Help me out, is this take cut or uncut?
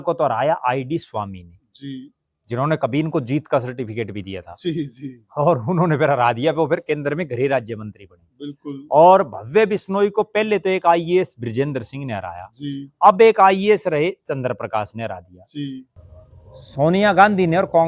cut